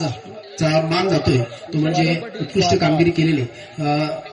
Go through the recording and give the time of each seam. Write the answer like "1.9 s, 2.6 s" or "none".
none

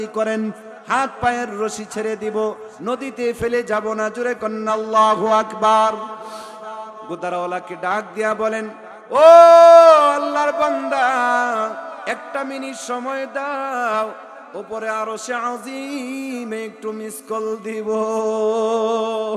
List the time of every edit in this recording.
none

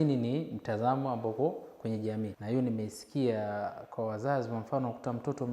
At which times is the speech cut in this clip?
2.4 s

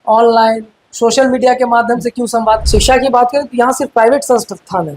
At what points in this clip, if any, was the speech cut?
2.6 s

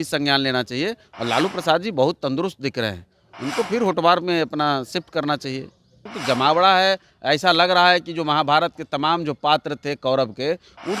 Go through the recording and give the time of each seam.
6.1 s

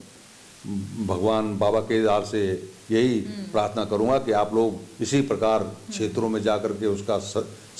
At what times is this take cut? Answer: none

